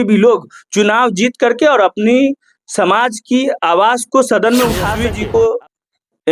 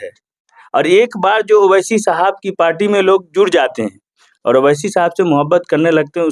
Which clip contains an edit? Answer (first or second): first